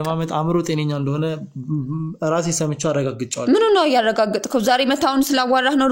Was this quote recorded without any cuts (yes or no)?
yes